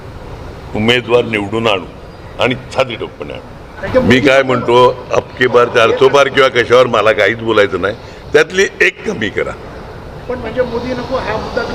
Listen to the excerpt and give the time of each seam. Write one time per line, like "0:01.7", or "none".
0:03.8